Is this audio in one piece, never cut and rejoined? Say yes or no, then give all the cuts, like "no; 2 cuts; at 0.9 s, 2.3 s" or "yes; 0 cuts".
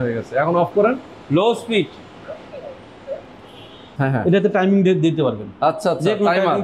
no; 1 cut; at 3.8 s